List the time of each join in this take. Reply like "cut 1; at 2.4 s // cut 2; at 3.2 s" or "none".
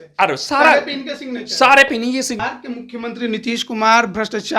cut 1; at 2.4 s